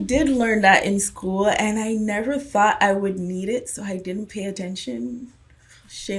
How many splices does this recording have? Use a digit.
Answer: 0